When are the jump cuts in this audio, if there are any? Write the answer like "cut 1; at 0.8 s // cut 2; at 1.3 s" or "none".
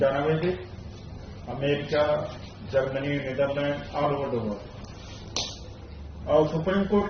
cut 1; at 6.1 s